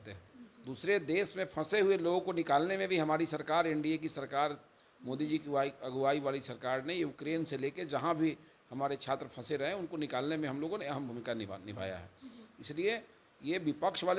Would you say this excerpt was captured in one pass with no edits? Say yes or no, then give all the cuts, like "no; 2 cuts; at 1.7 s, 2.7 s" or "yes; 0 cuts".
yes; 0 cuts